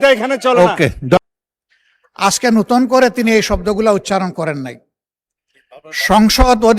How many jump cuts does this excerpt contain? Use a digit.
1